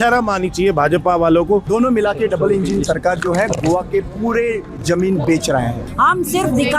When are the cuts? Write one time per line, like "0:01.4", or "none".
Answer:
0:01.7
0:05.8